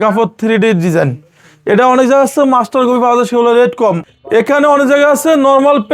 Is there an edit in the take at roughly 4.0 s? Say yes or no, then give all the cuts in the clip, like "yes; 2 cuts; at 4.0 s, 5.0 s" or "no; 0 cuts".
yes; 1 cut; at 4.0 s